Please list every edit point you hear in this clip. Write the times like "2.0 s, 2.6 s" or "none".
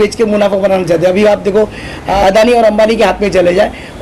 2.2 s